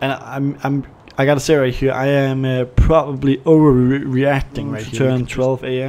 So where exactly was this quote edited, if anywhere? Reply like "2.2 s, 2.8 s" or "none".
4.9 s